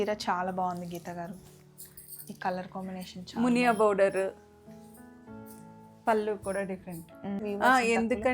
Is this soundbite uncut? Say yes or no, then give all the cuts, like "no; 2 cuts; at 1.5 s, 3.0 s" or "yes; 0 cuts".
no; 1 cut; at 7.4 s